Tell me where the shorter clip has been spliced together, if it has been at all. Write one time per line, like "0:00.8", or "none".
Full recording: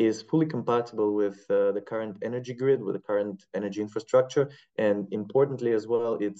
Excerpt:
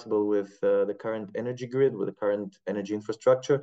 none